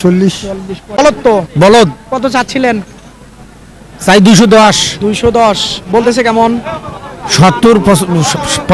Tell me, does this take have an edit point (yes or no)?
yes